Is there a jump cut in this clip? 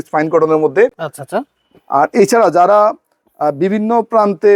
no; 0 cuts

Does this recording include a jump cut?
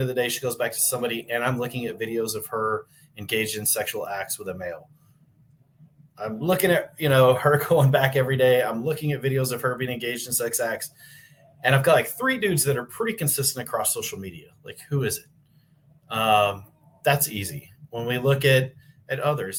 no; 0 cuts

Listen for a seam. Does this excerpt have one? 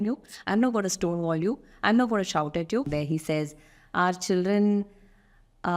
yes; 1 cut; at 2.9 s

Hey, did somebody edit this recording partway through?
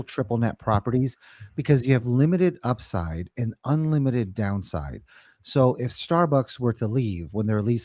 no; 0 cuts

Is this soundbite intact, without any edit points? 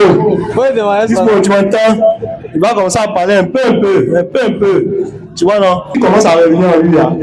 no; 1 cut; at 5.9 s

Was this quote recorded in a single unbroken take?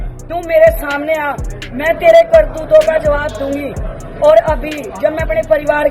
yes; 0 cuts

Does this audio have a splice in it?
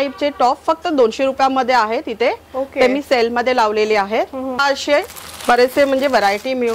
yes; 1 cut; at 4.6 s

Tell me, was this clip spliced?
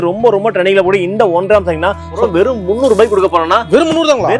yes; 1 cut; at 2.1 s

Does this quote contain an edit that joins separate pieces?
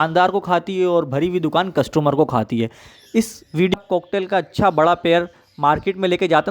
yes; 1 cut; at 3.7 s

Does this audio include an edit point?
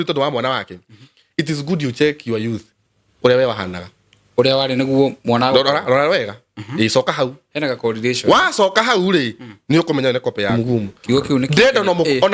yes; 1 cut; at 10.5 s

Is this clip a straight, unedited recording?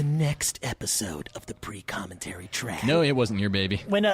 no; 1 cut; at 2.8 s

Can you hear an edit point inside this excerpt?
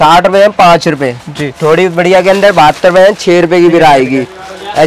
no; 0 cuts

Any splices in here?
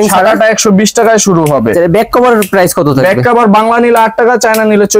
no; 0 cuts

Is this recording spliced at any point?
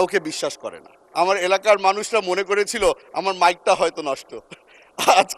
yes; 1 cut; at 1.0 s

